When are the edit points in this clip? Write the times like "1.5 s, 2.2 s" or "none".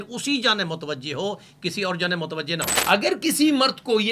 2.7 s